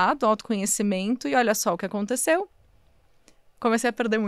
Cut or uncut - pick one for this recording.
uncut